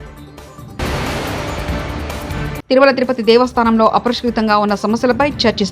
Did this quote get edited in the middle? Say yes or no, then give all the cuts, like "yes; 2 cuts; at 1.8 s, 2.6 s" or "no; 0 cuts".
yes; 1 cut; at 2.4 s